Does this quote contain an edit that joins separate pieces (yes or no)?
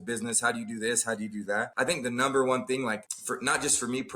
yes